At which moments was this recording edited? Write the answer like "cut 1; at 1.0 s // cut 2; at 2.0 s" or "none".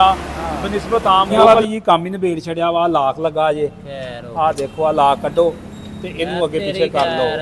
cut 1; at 1.3 s